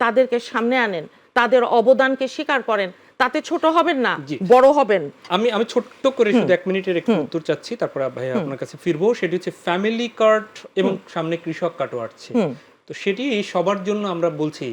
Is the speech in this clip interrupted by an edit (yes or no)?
no